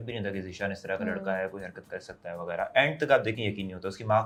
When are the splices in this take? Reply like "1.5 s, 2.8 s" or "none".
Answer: none